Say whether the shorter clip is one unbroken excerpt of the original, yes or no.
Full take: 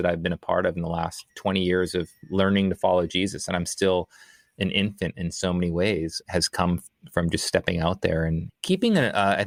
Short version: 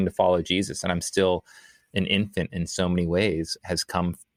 yes